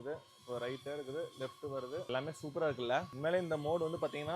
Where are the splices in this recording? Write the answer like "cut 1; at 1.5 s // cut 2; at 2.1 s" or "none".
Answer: cut 1; at 2.1 s // cut 2; at 3.1 s